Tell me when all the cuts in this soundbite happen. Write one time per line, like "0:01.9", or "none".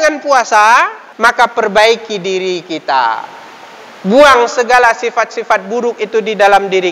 0:01.0